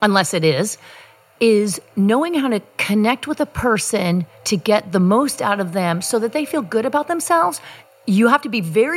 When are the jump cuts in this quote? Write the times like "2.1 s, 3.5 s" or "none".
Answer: 7.8 s